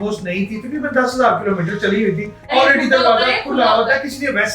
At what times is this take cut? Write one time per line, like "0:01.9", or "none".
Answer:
0:02.5